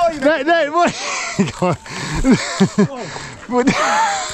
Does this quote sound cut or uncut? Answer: uncut